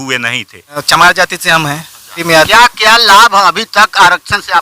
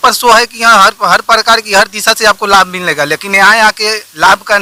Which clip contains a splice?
first; 2 cuts; at 0.8 s, 1.9 s

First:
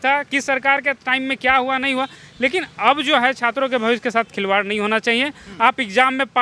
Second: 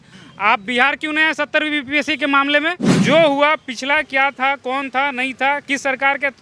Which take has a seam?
second; 1 cut; at 2.9 s

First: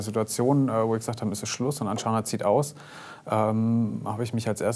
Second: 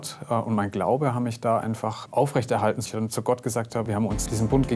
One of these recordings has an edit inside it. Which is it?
second; 3 cuts; at 2.0 s, 2.8 s, 3.9 s

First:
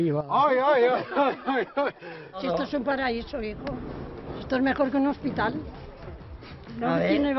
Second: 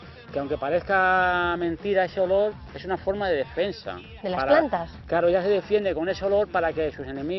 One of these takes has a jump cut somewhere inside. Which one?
first; 1 cut; at 2.3 s

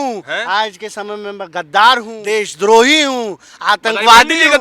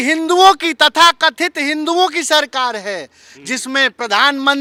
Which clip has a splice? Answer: first; 1 cut; at 2.1 s

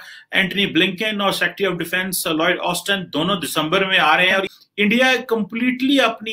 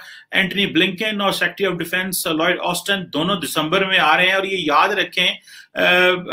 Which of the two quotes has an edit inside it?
first; 1 cut; at 4.5 s

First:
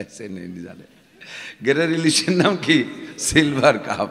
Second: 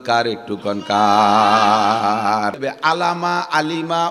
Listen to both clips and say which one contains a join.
second; 1 cut; at 2.7 s

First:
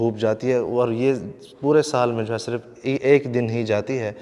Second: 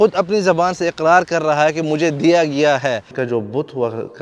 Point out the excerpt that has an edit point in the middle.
second; 1 cut; at 3.1 s

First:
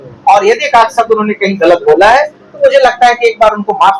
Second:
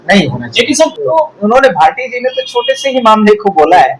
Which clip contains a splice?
second; 1 cut; at 1.0 s

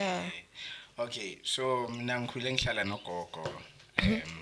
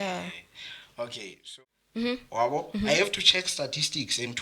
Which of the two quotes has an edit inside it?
second; 1 cut; at 1.4 s

